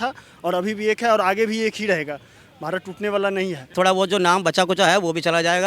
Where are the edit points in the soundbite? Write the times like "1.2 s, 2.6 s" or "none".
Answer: 3.7 s

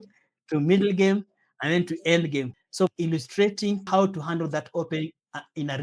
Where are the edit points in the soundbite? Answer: 2.5 s, 3.8 s

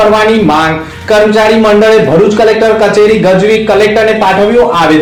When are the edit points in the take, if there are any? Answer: none

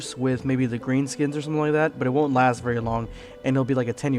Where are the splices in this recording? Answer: 3.2 s

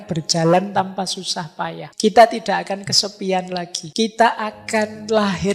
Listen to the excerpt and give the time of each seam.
1.8 s, 3.8 s

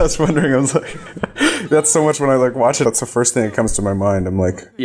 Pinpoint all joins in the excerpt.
2.8 s

